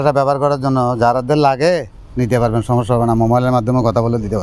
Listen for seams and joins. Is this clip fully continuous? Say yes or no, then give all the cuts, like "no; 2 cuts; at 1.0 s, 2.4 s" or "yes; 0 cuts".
yes; 0 cuts